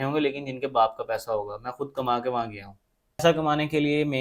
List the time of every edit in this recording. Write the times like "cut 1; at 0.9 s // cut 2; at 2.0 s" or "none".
cut 1; at 3.2 s

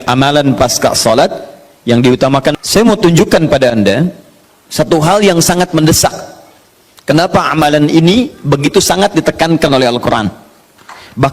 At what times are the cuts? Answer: cut 1; at 2.5 s

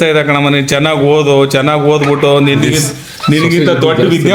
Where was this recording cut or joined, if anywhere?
none

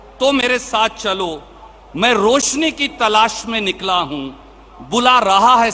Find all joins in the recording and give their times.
none

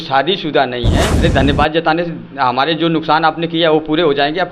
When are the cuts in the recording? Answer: cut 1; at 1.1 s

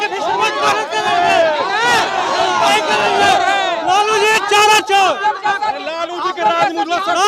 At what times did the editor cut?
none

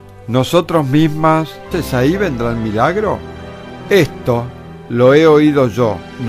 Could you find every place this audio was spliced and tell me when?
none

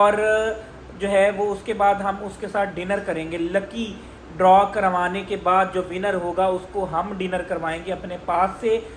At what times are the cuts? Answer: none

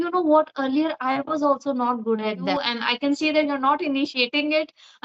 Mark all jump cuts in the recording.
cut 1; at 2.5 s

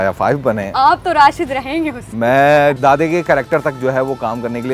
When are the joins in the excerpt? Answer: cut 1; at 2.8 s

